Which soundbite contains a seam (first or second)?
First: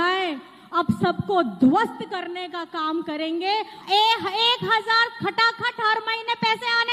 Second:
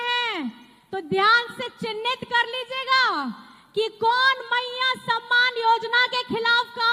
first